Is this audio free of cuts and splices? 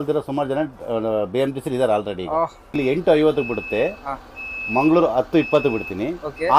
no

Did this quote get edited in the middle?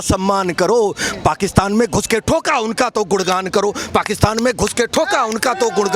no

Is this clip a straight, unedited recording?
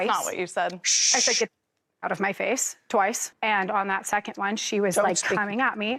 yes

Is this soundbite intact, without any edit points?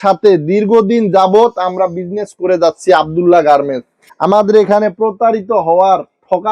yes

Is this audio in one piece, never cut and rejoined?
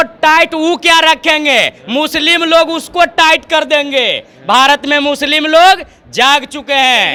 yes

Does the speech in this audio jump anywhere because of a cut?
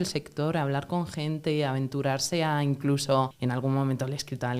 yes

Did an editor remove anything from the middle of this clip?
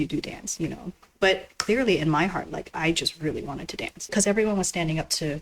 yes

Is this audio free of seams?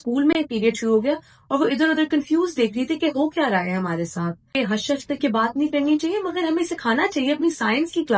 no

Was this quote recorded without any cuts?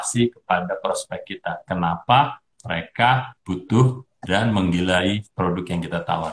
no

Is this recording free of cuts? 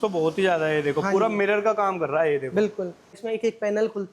no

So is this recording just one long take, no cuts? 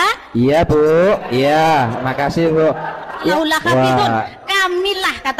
no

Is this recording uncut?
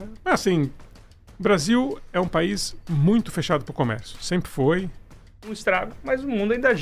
no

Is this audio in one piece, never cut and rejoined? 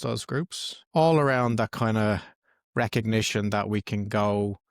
yes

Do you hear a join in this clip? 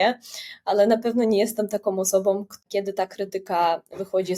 yes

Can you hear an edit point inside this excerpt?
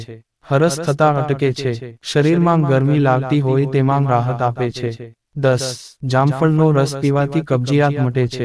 yes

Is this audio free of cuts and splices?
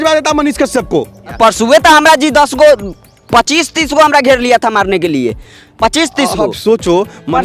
no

